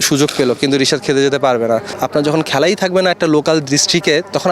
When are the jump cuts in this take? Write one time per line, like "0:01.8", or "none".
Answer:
0:01.9

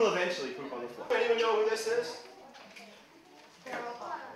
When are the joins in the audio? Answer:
0:01.1

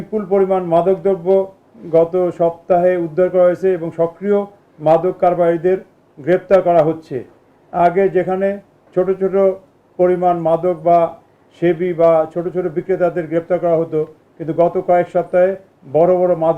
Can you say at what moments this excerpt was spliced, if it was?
none

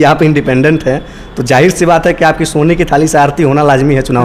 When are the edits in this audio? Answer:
none

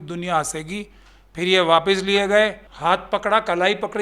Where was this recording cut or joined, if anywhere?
0:02.7

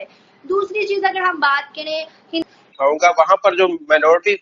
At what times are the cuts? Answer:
0:02.5

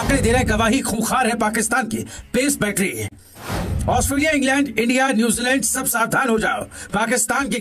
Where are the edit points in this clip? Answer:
none

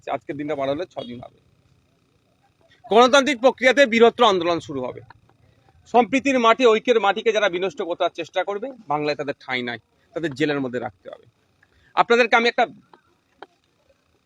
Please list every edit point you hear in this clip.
none

